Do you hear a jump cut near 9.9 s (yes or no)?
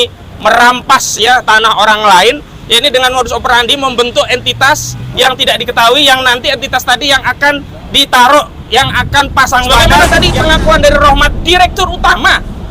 yes